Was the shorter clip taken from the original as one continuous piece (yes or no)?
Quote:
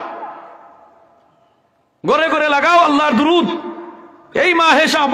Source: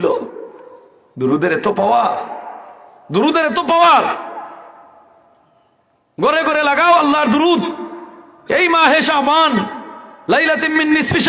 yes